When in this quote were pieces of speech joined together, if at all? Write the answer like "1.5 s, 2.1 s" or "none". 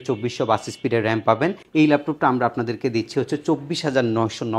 1.6 s